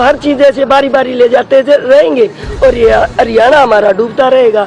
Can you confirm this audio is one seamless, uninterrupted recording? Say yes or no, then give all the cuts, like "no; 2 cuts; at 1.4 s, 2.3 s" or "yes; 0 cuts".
yes; 0 cuts